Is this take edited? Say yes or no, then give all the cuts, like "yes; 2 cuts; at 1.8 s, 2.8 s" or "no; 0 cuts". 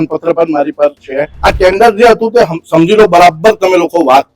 yes; 1 cut; at 1.2 s